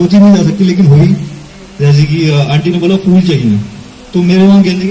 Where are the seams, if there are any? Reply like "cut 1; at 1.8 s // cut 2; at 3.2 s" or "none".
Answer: none